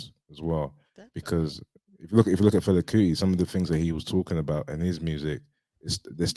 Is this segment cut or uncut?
uncut